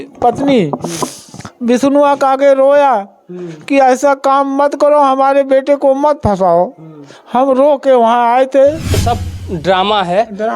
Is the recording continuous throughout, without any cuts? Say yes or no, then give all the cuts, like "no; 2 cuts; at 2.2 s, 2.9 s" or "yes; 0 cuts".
no; 1 cut; at 9.0 s